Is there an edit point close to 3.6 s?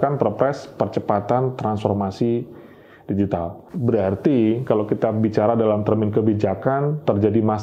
yes; 1 cut; at 3.6 s

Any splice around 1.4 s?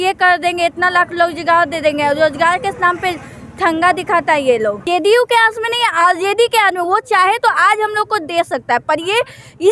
no; 1 cut; at 4.8 s

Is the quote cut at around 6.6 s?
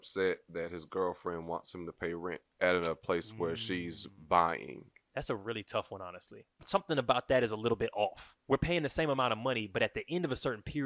yes; 3 cuts; at 2.5 s, 5.0 s, 6.6 s

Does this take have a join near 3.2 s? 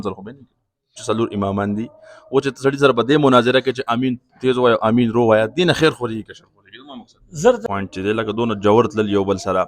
no; 2 cuts; at 1.0 s, 7.6 s

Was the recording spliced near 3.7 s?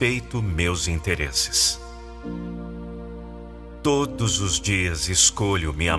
yes; 2 cuts; at 2.0 s, 3.7 s

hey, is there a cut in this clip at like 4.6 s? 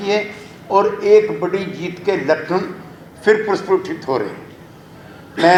no; 0 cuts

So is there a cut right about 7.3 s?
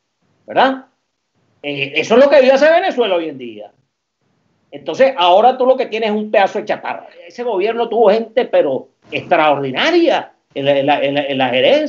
yes; 1 cut; at 7.3 s

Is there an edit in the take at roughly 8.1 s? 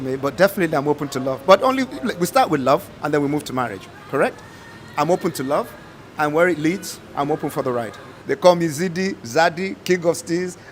yes; 1 cut; at 8.1 s

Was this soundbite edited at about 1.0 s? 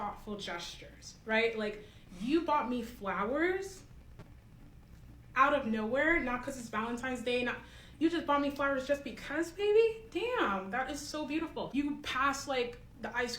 no; 1 cut; at 11.4 s

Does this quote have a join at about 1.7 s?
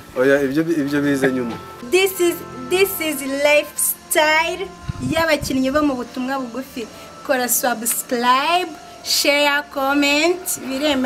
yes; 1 cut; at 1.7 s

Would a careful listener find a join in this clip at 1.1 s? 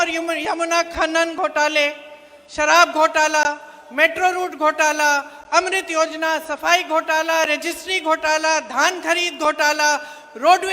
yes; 1 cut; at 1.1 s

